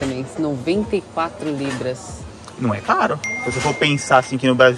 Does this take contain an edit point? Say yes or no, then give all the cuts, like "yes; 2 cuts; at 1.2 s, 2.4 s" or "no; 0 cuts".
no; 0 cuts